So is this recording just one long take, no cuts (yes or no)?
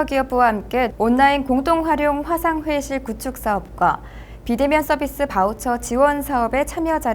no